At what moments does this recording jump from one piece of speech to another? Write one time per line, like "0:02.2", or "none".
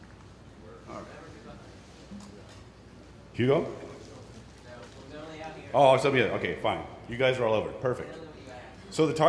0:02.1